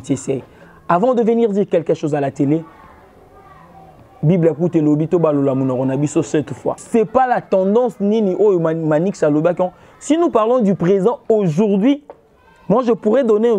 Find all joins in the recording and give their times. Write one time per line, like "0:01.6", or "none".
0:06.8